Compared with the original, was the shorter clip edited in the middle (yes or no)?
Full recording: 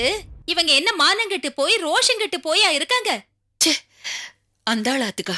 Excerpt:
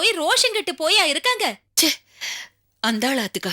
yes